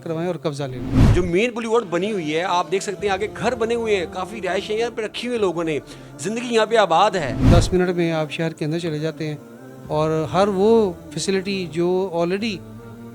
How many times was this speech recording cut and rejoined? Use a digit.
2